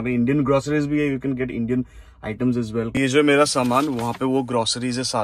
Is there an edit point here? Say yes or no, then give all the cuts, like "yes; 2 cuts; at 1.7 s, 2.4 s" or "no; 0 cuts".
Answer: no; 0 cuts